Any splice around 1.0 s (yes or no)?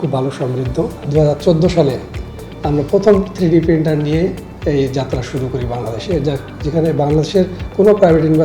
yes